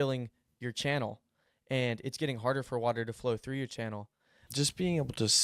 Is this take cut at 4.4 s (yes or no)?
yes